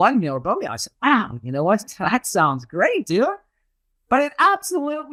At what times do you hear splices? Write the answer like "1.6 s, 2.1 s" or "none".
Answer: none